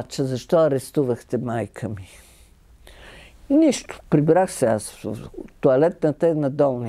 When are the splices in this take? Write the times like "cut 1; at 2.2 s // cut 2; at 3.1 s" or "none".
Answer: none

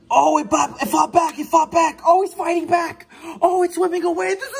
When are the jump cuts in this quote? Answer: none

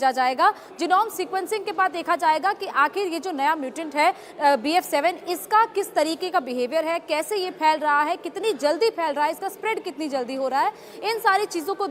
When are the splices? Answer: none

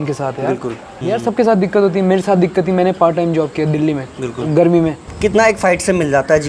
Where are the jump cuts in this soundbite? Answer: cut 1; at 1.0 s // cut 2; at 5.1 s

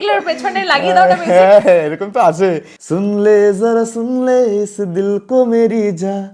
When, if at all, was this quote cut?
cut 1; at 2.7 s

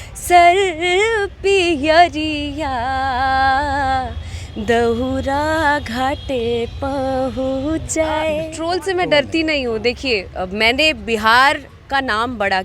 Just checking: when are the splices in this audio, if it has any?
cut 1; at 8.5 s

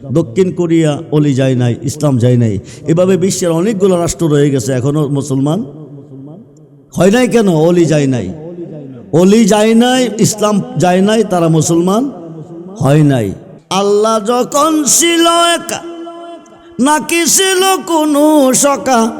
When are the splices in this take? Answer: cut 1; at 13.5 s

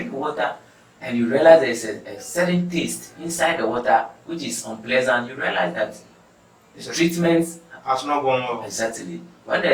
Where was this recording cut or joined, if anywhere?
none

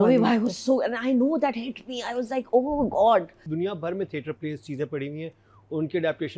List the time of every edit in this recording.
cut 1; at 3.4 s

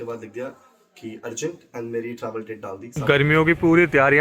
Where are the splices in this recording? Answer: cut 1; at 3.0 s

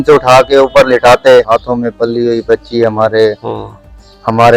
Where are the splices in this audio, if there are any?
cut 1; at 1.5 s

